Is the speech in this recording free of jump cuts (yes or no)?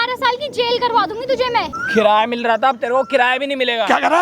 no